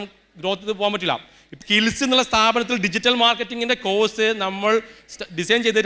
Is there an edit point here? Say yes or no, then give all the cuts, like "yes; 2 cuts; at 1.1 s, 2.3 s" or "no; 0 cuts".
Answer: yes; 1 cut; at 1.5 s